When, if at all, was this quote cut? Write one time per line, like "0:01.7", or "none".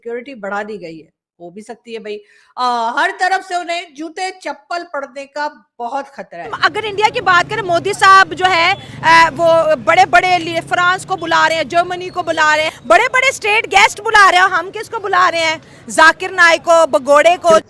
0:06.5
0:12.7